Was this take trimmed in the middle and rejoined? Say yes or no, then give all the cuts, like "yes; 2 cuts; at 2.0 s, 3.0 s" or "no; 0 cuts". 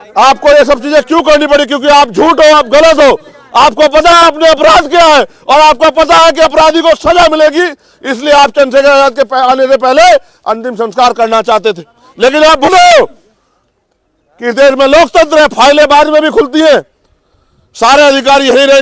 yes; 1 cut; at 12.7 s